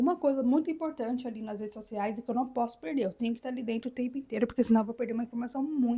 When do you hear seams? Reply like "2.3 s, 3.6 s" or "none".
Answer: none